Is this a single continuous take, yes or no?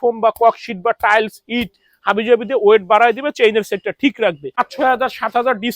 no